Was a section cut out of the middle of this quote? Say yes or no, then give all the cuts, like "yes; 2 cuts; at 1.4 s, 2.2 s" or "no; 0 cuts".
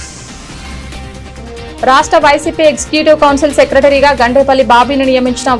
yes; 1 cut; at 1.0 s